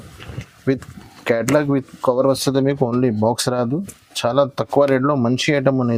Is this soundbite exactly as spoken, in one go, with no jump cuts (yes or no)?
yes